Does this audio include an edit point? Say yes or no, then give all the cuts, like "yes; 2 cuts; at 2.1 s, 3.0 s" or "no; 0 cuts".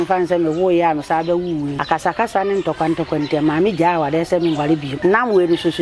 yes; 2 cuts; at 1.8 s, 4.9 s